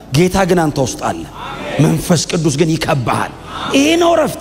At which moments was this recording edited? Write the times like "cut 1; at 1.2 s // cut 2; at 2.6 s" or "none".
none